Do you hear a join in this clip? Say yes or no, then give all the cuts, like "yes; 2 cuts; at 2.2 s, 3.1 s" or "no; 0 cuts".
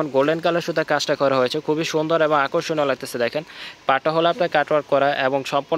no; 0 cuts